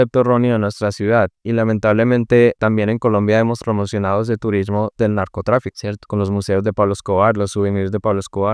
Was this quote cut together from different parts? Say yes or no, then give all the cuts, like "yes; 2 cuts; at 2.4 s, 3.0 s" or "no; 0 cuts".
no; 0 cuts